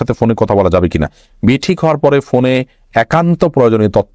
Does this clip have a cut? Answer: no; 0 cuts

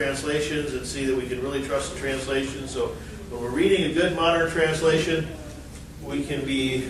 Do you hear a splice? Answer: yes; 1 cut; at 5.9 s

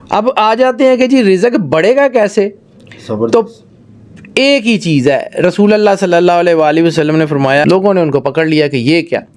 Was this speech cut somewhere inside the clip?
yes; 1 cut; at 7.6 s

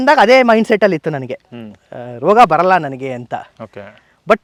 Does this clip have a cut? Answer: no; 0 cuts

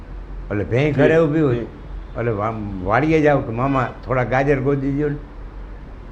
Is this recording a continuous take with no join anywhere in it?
yes; 0 cuts

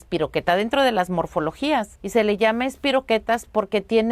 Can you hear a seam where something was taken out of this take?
yes; 1 cut; at 2.0 s

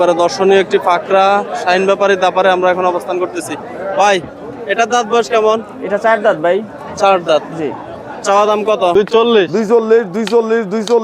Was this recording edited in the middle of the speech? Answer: yes; 1 cut; at 8.9 s

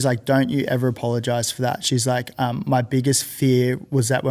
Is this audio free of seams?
yes; 0 cuts

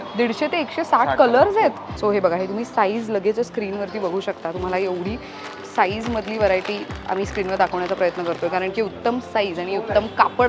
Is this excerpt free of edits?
no; 1 cut; at 1.9 s

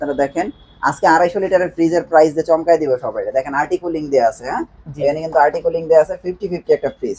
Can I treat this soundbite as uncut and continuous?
yes; 0 cuts

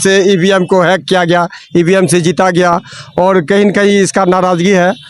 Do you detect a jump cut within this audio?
no; 0 cuts

